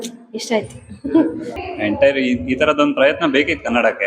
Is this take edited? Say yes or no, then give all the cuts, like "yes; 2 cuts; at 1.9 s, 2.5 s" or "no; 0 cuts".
yes; 1 cut; at 1.5 s